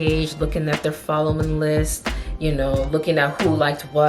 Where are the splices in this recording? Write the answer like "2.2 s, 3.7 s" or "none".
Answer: none